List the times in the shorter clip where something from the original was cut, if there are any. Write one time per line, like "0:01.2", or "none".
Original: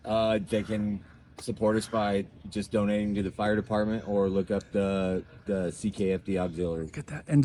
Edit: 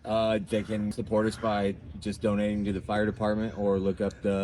0:01.0